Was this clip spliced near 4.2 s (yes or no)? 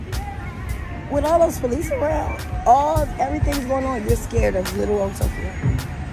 no